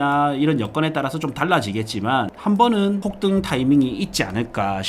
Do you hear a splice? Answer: yes; 2 cuts; at 2.3 s, 3.0 s

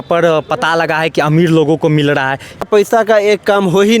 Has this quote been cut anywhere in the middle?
yes; 1 cut; at 2.6 s

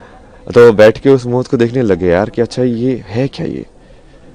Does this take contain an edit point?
no; 0 cuts

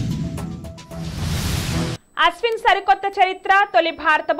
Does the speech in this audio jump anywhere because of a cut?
yes; 1 cut; at 1.8 s

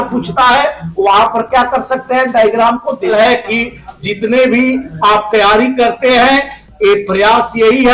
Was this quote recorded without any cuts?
no; 1 cut; at 3.1 s

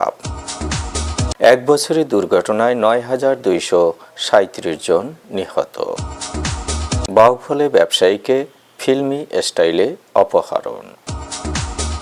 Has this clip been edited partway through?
no; 0 cuts

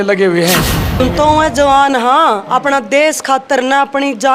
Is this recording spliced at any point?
yes; 1 cut; at 1.0 s

